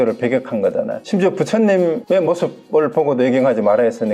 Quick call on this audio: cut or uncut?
cut